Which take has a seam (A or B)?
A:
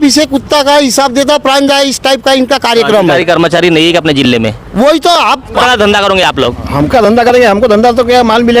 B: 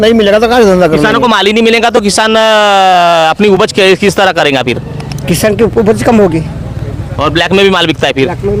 A